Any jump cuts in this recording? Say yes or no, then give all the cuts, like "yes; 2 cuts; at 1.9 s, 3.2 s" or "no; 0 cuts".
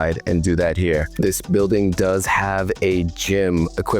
yes; 1 cut; at 1.1 s